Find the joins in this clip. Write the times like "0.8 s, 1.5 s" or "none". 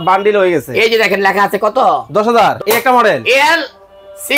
2.6 s